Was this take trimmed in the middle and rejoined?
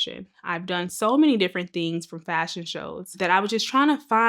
yes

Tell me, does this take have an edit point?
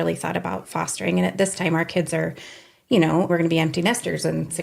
yes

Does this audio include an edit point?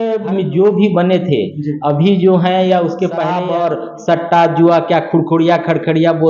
yes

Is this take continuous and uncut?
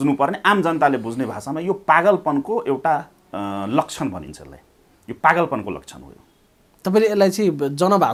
yes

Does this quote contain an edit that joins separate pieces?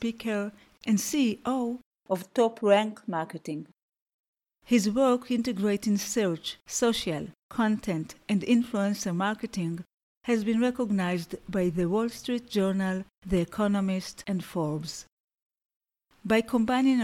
yes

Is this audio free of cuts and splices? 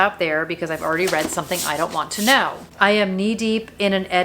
no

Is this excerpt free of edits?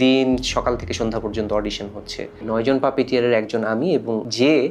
yes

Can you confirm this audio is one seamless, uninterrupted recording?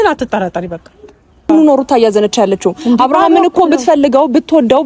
no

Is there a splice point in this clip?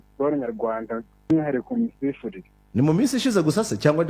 no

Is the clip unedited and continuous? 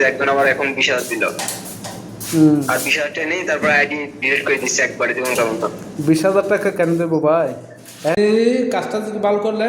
no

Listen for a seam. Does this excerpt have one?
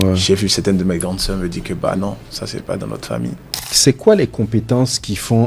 yes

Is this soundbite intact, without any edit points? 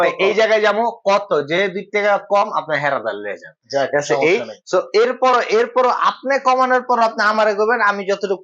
yes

